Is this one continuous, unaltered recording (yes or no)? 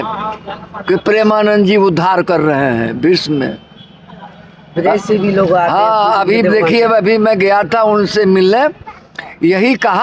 yes